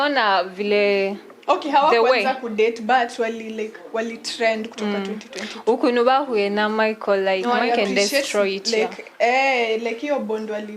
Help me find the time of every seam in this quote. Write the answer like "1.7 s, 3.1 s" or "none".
7.4 s